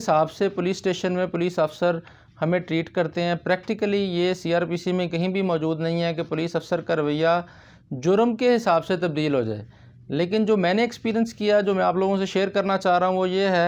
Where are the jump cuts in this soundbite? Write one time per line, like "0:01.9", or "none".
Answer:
none

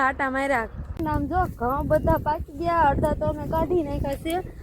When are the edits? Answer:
0:00.9

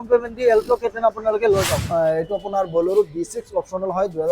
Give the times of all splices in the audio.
0:01.8

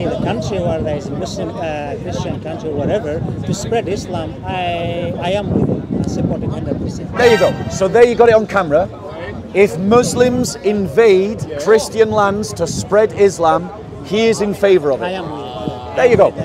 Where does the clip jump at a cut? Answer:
none

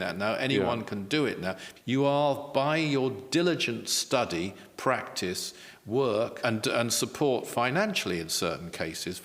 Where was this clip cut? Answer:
0:01.7
0:06.4

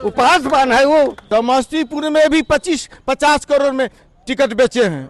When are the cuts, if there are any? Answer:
0:01.2

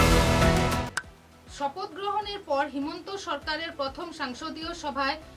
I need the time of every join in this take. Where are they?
none

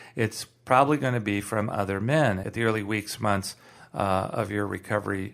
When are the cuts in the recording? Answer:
0:02.4

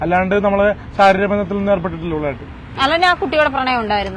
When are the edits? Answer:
0:02.7

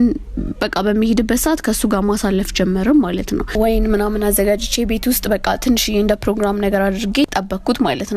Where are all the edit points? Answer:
0:03.6
0:07.3

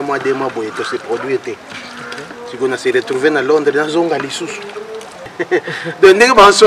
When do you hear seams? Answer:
0:05.2

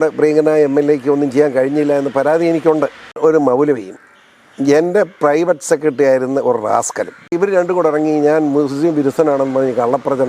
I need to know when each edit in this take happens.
0:03.2
0:07.3

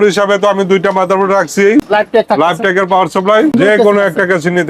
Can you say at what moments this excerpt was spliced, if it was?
0:01.9
0:03.5

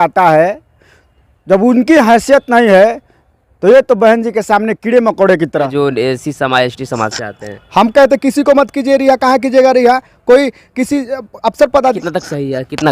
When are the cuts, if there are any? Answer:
0:05.7
0:12.0

